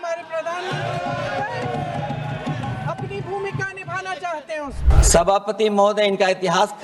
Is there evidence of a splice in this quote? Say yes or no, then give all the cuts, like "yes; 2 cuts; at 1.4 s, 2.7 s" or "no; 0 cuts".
yes; 1 cut; at 4.9 s